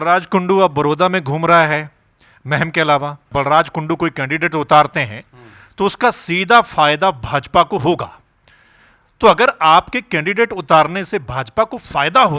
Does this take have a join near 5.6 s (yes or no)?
no